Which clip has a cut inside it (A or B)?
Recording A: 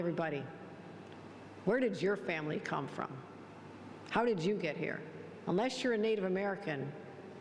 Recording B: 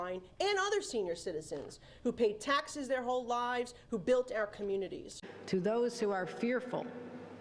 B